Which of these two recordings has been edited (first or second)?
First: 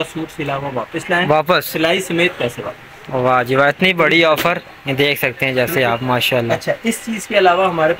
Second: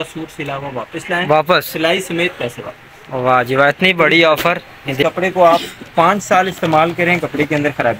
second